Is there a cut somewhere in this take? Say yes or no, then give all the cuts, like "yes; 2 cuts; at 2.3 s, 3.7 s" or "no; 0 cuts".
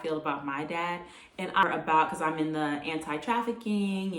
yes; 1 cut; at 1.6 s